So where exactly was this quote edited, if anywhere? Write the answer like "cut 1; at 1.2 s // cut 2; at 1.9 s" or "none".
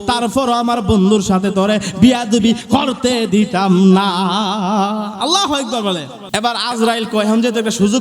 cut 1; at 6.2 s